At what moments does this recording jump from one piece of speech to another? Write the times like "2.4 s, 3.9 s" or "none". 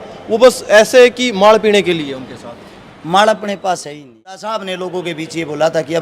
4.4 s

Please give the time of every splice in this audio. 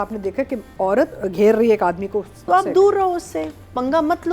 1.1 s, 2.5 s

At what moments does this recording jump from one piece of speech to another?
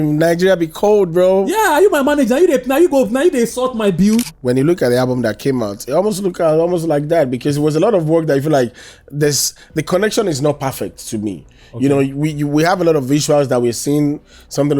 4.3 s

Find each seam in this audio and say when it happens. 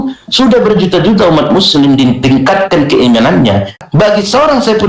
3.8 s

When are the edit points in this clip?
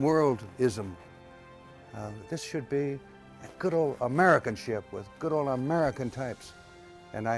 none

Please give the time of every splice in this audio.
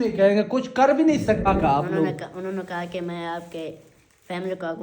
1.5 s

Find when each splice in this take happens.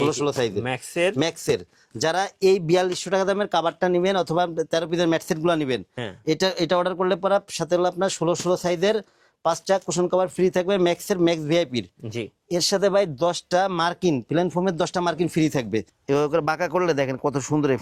15.9 s

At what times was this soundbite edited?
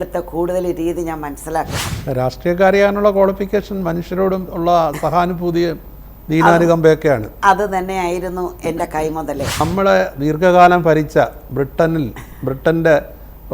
1.9 s, 9.6 s

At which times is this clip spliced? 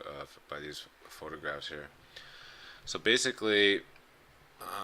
1.6 s

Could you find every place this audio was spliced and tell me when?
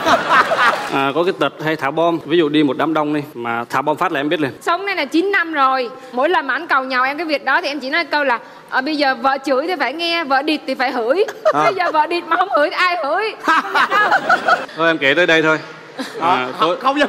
0.8 s, 2.2 s, 4.6 s, 14.6 s

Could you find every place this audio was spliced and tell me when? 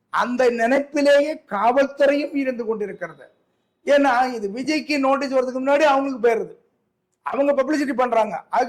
none

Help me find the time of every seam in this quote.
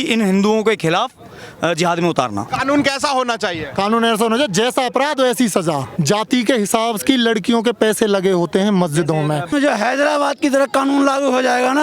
2.5 s, 5.9 s, 9.5 s

